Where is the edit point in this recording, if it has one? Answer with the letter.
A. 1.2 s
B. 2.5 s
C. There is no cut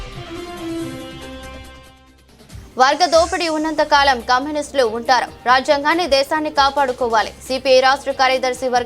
B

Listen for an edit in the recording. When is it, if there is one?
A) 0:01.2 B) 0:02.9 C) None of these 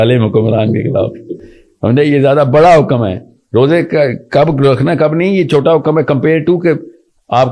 C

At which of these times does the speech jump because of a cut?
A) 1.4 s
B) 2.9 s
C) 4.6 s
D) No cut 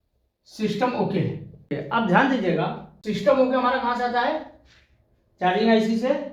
D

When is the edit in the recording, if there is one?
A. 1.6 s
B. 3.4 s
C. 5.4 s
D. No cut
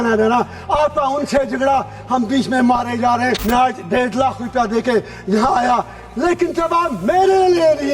B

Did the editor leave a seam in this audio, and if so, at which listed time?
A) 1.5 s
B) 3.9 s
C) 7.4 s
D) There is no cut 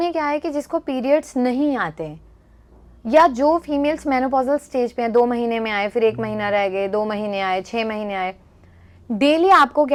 D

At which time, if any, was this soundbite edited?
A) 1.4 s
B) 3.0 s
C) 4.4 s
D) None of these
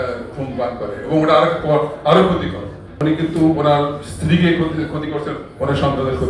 B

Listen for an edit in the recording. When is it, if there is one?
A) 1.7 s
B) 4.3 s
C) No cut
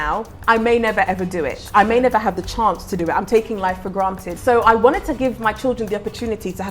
B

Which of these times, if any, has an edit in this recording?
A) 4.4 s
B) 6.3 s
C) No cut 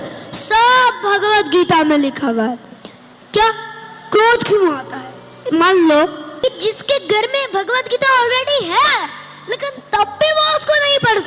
B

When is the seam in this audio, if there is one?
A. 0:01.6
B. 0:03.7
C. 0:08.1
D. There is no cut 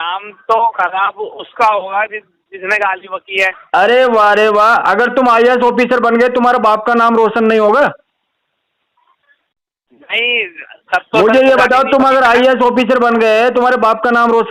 D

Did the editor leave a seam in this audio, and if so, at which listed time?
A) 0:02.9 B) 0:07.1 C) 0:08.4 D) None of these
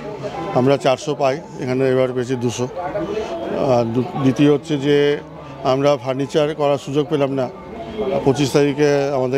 D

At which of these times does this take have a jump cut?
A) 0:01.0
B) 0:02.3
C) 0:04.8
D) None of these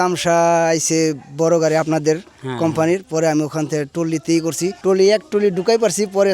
C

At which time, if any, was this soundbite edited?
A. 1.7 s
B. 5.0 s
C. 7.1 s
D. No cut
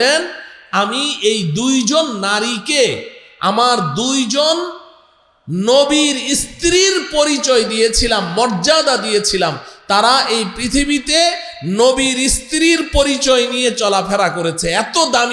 D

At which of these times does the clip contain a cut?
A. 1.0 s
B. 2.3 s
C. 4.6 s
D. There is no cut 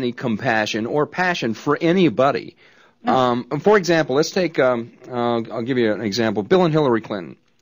D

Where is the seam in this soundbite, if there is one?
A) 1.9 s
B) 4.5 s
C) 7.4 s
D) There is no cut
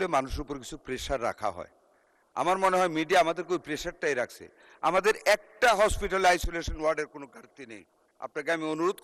D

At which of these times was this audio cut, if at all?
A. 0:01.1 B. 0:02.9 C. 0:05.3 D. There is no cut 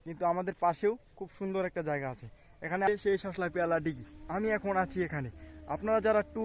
B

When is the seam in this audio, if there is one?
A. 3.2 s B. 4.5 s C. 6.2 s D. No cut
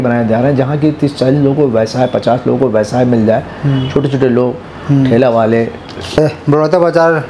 C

